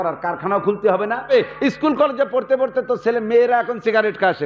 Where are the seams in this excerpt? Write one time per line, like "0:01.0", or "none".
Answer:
0:01.3